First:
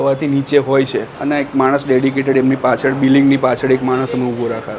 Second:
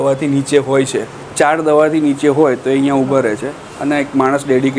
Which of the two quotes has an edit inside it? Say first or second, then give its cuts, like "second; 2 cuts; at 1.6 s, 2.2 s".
first; 1 cut; at 1.1 s